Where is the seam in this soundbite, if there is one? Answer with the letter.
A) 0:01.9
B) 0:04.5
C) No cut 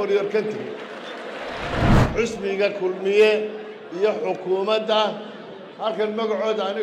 A